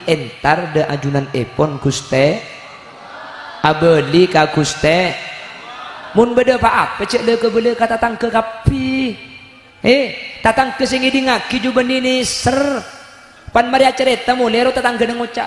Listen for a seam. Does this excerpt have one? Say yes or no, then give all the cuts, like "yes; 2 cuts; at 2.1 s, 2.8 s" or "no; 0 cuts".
no; 0 cuts